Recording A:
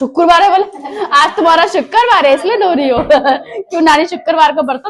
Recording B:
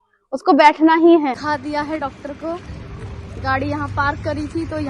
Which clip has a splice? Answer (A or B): B